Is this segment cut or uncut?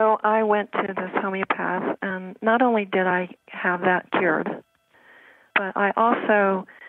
cut